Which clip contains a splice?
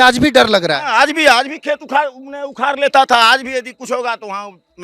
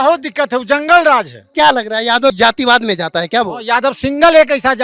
second; 1 cut; at 1.4 s

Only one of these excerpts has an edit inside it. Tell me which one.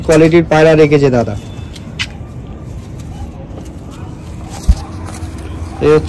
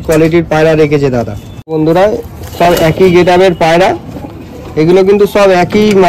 second; 1 cut; at 1.8 s

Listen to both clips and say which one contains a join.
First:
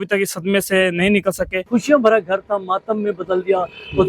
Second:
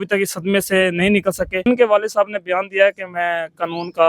first; 1 cut; at 1.6 s

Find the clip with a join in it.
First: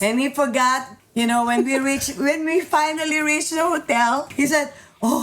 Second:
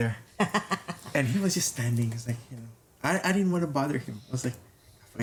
first; 2 cuts; at 1.0 s, 4.3 s

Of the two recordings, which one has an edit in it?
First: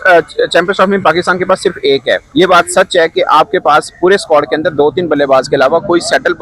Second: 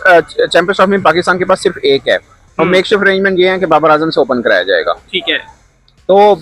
first; 1 cut; at 2.2 s

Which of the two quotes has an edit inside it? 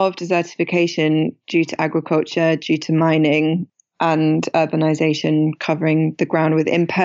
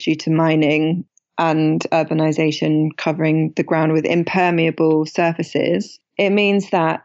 second; 1 cut; at 6.0 s

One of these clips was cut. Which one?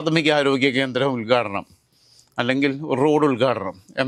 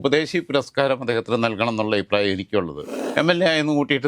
second; 1 cut; at 3.0 s

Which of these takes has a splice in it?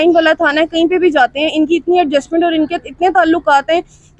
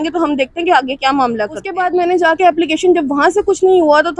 second; 1 cut; at 1.7 s

